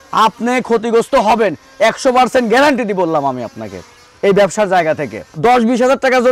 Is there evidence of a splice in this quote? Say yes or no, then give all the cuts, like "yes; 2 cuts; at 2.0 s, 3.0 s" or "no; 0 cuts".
yes; 1 cut; at 5.4 s